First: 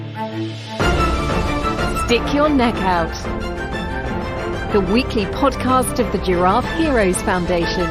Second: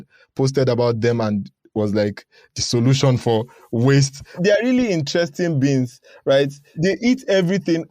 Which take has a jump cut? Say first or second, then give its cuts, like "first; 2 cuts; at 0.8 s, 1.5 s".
second; 2 cuts; at 4.4 s, 6.7 s